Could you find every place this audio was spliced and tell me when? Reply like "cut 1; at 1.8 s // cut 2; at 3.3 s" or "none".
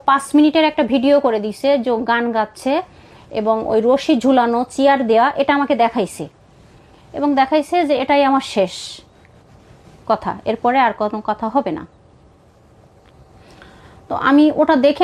none